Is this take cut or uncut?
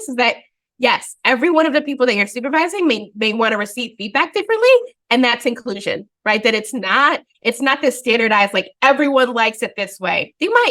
uncut